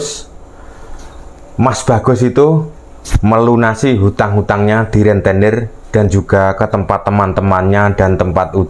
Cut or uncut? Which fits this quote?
uncut